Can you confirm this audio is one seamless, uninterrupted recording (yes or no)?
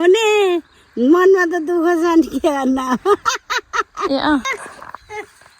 no